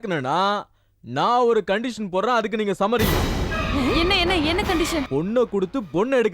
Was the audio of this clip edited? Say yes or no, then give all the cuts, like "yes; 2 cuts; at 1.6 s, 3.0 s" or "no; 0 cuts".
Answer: yes; 1 cut; at 5.1 s